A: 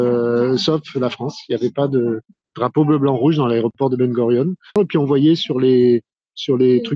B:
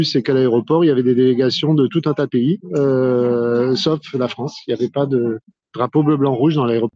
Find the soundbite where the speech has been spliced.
A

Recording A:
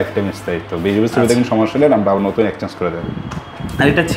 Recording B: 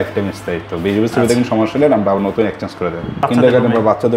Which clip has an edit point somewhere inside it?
B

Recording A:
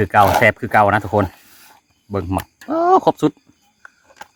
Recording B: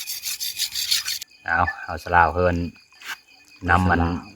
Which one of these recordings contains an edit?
B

